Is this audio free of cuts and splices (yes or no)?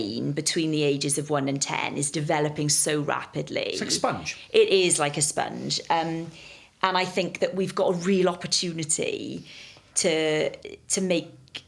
yes